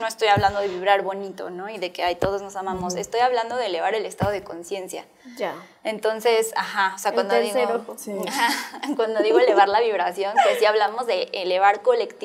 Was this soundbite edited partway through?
no; 0 cuts

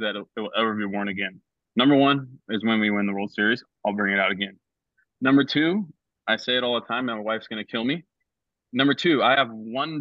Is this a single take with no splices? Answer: yes; 0 cuts

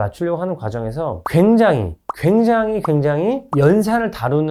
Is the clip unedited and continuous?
yes; 0 cuts

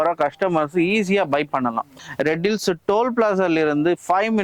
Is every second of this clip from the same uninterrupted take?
no; 1 cut; at 2.0 s

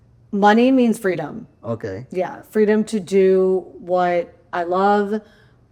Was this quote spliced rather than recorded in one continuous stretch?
no; 0 cuts

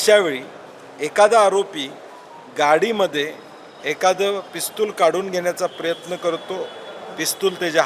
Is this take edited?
no; 0 cuts

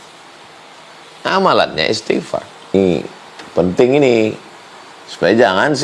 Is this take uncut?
no; 1 cut; at 2.7 s

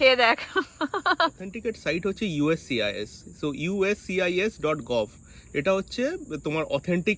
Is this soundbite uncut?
no; 1 cut; at 1.5 s

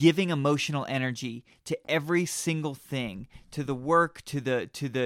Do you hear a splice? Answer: no; 0 cuts

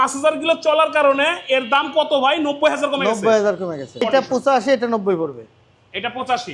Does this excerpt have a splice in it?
yes; 1 cut; at 4.0 s

